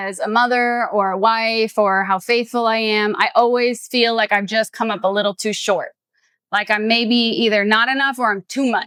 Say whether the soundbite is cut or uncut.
uncut